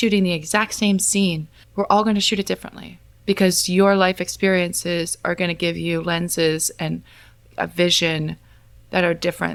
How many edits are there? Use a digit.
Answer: 0